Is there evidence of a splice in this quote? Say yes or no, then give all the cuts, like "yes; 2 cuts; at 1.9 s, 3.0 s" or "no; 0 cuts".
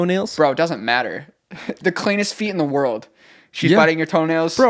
no; 0 cuts